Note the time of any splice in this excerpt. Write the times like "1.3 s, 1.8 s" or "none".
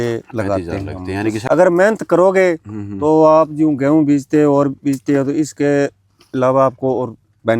1.4 s